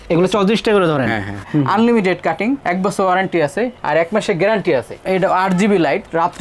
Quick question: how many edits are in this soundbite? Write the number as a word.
two